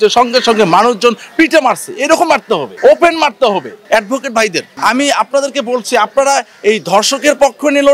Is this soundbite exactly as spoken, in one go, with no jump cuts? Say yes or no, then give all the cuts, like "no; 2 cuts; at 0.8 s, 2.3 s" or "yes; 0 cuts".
no; 3 cuts; at 2.7 s, 3.8 s, 4.7 s